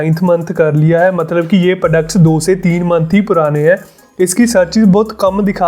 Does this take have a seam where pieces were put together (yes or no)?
yes